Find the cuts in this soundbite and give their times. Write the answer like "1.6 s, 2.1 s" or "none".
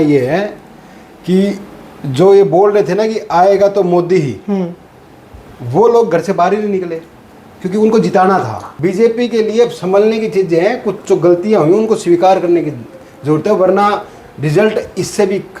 8.6 s